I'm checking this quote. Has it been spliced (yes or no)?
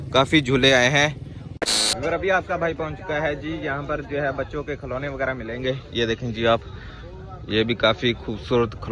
yes